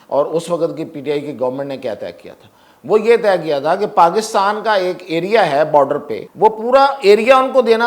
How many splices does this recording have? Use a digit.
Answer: 1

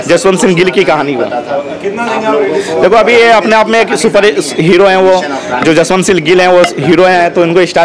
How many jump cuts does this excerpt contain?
0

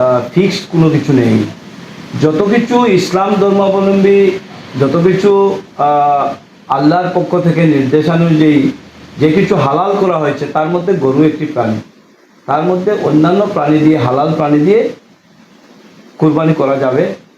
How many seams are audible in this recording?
0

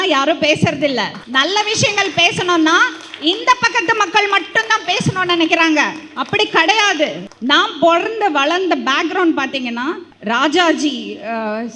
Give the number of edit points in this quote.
3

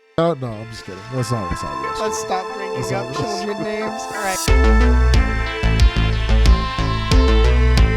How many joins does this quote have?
1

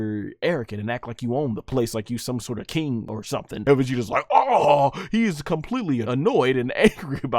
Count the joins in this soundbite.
3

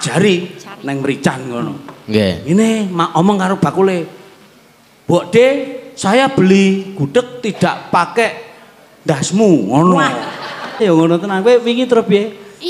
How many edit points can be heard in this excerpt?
1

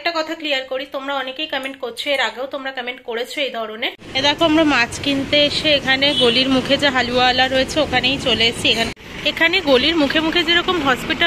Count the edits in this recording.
2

